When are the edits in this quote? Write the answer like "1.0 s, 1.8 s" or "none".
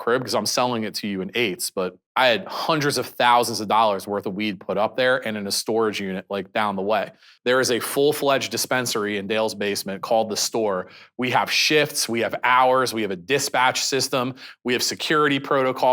2.0 s, 7.3 s